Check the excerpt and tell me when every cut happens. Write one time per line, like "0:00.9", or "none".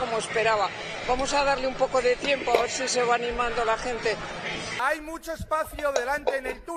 none